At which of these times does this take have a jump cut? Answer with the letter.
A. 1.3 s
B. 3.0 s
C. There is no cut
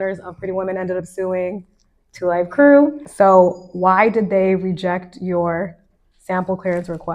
B